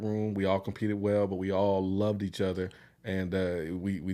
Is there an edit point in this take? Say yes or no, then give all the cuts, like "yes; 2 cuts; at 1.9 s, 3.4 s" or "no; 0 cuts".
no; 0 cuts